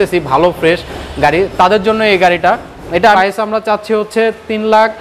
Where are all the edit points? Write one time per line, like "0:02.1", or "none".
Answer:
0:03.0